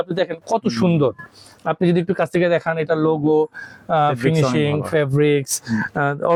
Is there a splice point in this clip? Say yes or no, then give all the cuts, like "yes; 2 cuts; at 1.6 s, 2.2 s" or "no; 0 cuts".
no; 0 cuts